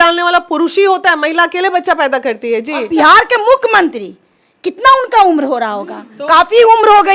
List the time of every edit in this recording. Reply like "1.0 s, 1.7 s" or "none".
2.9 s